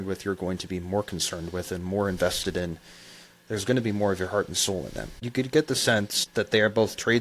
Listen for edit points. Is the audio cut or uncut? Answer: cut